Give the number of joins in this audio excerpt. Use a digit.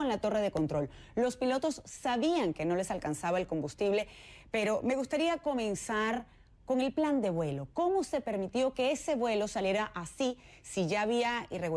0